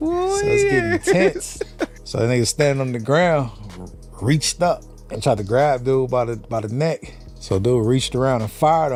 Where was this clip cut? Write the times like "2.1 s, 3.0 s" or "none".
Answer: none